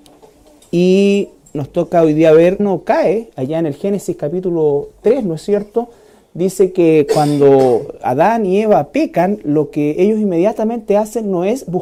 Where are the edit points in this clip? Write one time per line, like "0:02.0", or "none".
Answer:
none